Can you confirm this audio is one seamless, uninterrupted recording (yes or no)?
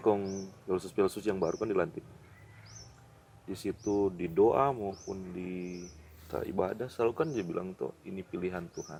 yes